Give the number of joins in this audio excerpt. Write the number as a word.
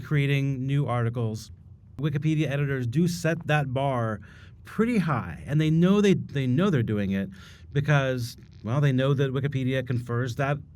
one